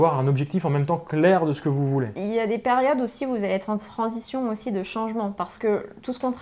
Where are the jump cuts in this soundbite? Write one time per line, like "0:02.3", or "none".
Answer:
0:02.1